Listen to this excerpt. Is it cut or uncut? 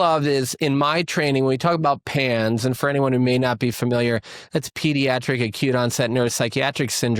uncut